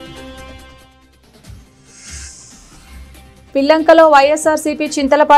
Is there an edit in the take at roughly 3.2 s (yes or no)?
yes